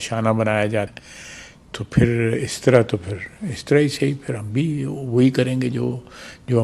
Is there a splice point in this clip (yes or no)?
yes